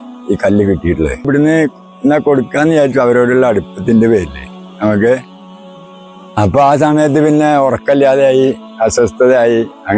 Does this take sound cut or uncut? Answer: cut